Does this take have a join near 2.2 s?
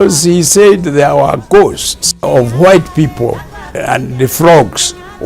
yes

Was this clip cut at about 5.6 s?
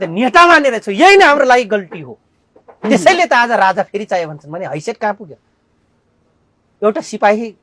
no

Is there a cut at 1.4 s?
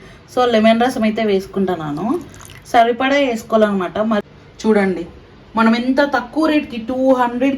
no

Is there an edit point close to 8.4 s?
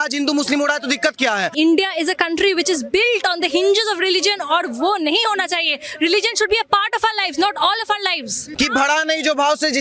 yes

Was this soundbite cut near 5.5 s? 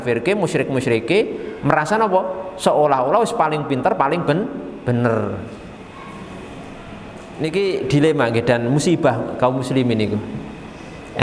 no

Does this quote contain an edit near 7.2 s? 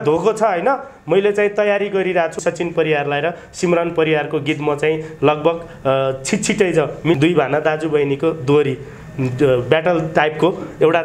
yes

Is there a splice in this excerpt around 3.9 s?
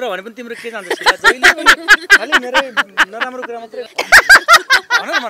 yes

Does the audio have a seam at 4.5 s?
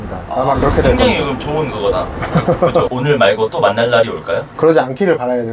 no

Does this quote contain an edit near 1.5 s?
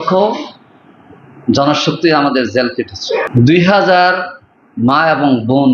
no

